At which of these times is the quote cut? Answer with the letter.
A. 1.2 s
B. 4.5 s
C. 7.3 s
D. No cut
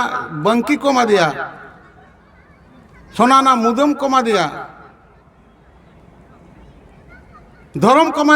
D